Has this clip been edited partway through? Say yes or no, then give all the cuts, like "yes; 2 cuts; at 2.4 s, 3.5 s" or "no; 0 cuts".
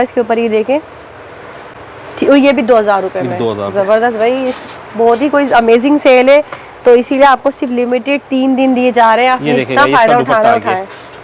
no; 0 cuts